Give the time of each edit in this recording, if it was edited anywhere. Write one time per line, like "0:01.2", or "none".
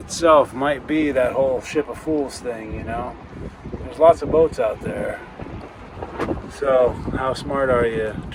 none